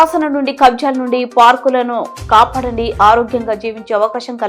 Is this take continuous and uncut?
yes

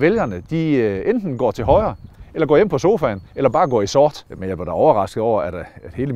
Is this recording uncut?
no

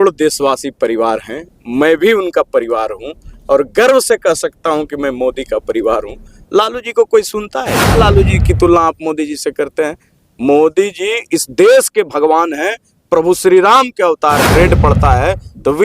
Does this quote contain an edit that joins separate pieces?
yes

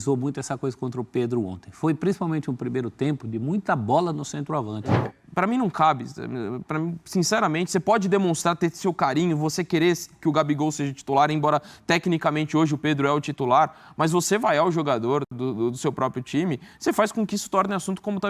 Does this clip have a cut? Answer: yes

